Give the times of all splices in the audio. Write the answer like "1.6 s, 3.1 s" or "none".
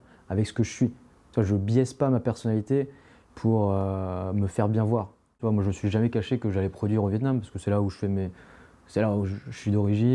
5.4 s